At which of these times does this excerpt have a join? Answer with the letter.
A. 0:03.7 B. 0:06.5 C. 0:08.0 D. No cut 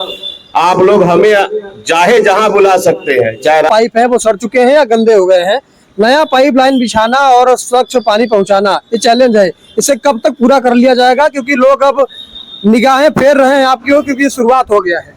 A